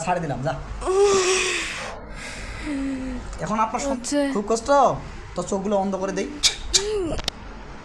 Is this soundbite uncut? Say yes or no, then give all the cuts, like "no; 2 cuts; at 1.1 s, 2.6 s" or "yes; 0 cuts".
no; 1 cut; at 3.9 s